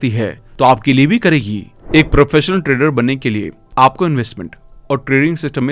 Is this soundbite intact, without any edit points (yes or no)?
no